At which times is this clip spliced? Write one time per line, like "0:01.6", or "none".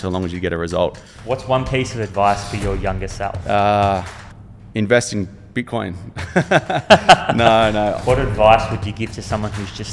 0:01.1
0:03.4
0:08.0